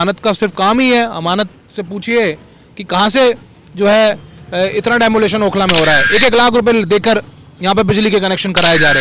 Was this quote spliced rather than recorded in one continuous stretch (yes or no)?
no